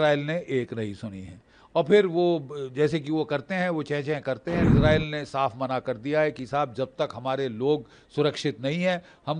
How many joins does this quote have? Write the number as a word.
one